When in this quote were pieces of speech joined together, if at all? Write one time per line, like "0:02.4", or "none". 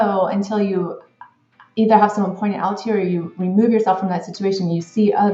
none